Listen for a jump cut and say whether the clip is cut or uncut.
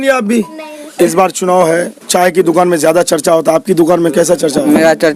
uncut